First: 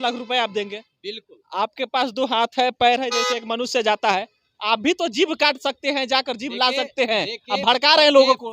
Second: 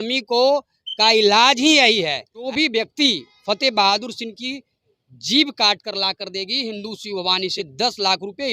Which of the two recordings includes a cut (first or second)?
second